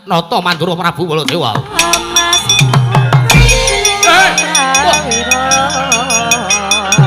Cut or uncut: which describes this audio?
cut